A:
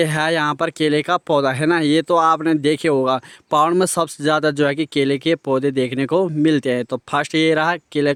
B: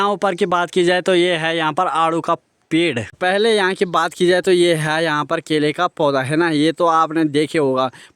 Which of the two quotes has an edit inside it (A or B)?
B